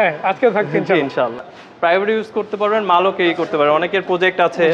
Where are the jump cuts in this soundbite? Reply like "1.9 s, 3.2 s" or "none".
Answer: 1.5 s